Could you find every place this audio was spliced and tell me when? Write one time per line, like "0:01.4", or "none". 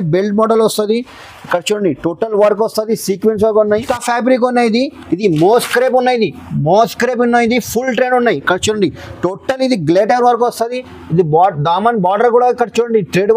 0:03.8